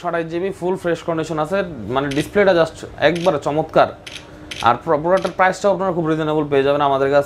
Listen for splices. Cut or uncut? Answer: uncut